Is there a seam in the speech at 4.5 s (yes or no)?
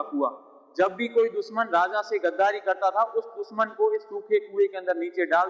no